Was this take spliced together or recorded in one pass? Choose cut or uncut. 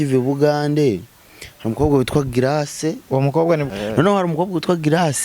cut